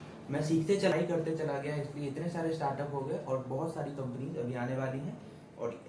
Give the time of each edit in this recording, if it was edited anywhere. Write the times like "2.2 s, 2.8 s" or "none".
0.9 s